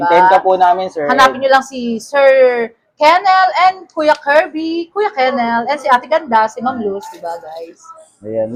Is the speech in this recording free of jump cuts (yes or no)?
yes